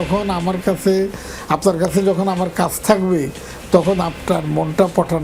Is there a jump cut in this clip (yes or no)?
no